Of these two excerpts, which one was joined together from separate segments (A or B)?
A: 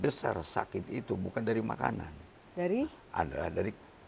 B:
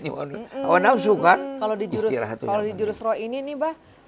B